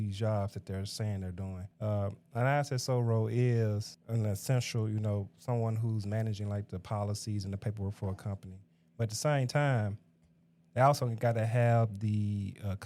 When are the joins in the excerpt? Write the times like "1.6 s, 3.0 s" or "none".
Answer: 1.7 s, 3.9 s